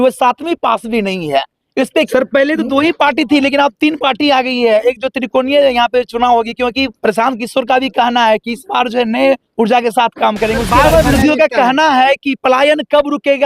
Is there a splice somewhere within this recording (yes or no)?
yes